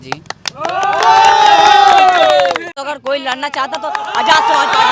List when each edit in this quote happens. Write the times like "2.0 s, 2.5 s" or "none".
2.7 s